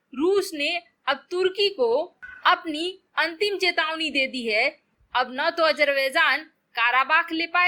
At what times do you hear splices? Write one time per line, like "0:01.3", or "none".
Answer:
0:04.9